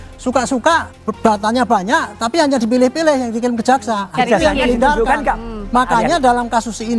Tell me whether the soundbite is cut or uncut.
cut